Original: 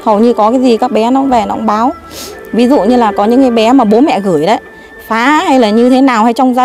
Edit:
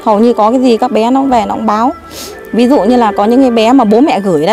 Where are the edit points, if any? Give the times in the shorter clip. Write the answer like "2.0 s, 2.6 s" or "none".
none